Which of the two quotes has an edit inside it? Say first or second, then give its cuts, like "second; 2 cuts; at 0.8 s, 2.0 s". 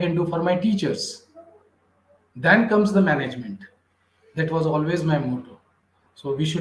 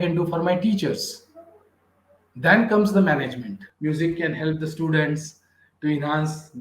second; 1 cut; at 3.6 s